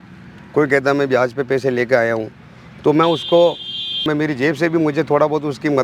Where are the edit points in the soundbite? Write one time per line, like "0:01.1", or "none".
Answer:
0:04.0